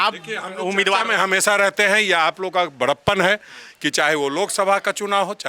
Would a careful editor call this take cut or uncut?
uncut